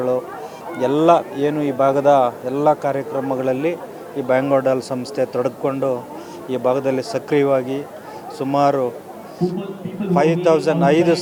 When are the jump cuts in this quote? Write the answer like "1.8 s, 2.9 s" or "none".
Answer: none